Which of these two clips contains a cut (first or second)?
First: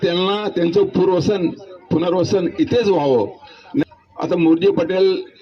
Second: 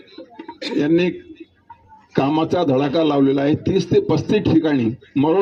first